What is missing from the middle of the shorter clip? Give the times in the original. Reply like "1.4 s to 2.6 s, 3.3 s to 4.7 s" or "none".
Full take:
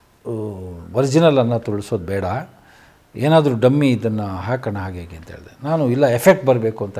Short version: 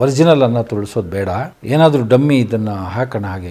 2.5 s to 3.0 s